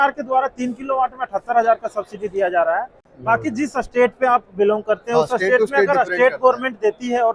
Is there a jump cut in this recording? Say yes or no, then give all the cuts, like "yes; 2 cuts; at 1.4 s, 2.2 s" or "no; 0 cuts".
no; 0 cuts